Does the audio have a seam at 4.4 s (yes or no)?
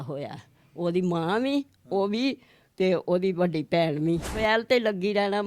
yes